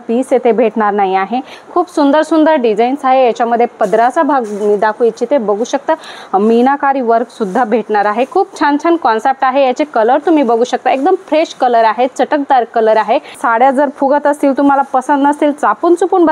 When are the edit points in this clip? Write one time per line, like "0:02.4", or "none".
0:01.5
0:06.1
0:13.3

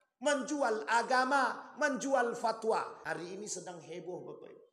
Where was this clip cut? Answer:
0:03.0

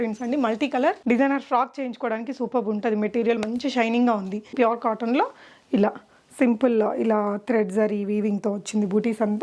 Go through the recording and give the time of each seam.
0:01.0
0:04.5

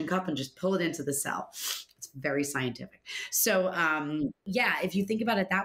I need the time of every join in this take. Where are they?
0:04.4

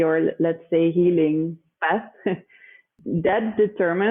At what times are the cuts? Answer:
0:01.7
0:03.0

